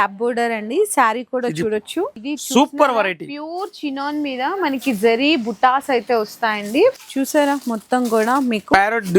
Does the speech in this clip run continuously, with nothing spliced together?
no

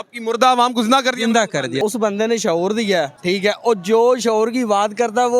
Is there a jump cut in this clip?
yes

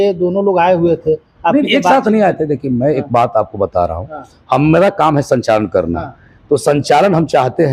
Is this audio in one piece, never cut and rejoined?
yes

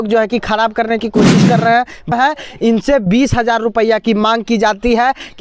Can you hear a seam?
yes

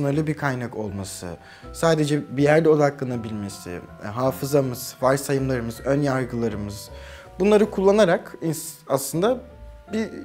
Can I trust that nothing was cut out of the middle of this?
yes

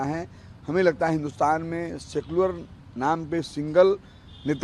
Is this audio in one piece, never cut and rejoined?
yes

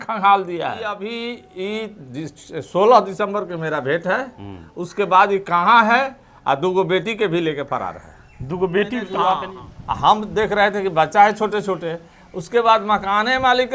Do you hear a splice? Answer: yes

